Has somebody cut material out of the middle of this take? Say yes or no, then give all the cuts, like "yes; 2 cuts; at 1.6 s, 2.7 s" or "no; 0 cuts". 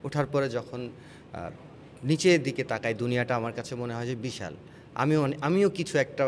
no; 0 cuts